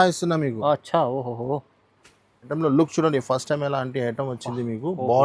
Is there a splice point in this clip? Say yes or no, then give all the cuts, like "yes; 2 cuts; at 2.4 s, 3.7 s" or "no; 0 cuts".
yes; 1 cut; at 2.5 s